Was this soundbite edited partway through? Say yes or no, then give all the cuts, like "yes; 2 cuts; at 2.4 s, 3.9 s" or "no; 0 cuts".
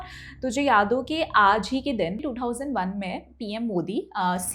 yes; 1 cut; at 2.2 s